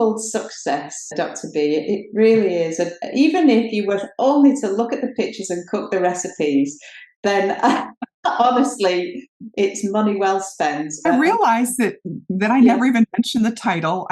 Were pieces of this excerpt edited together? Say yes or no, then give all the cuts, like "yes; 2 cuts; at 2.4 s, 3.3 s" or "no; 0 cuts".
no; 0 cuts